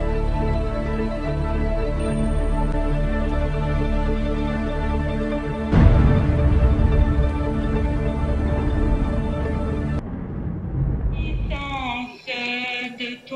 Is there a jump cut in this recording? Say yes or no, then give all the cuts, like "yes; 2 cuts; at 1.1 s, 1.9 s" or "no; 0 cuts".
yes; 1 cut; at 11.5 s